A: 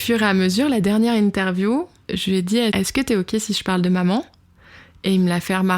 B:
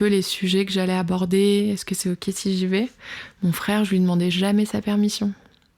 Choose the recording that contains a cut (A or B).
A